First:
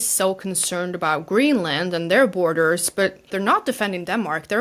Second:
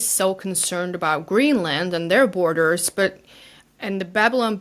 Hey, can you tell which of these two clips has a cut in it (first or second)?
first